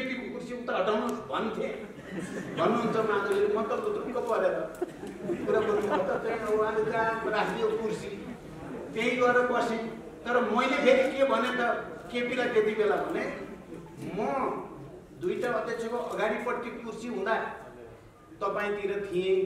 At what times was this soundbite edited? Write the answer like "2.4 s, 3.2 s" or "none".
none